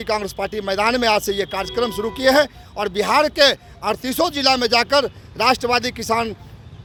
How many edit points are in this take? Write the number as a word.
zero